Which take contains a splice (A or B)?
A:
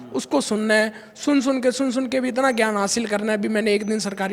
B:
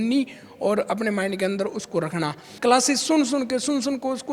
B